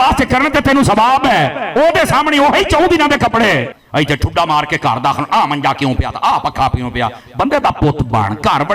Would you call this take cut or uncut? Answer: cut